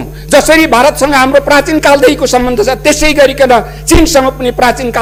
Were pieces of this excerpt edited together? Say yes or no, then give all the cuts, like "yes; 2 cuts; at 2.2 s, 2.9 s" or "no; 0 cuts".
no; 0 cuts